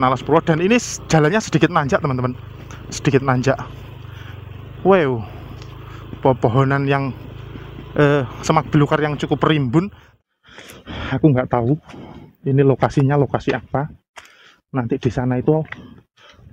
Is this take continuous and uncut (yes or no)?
no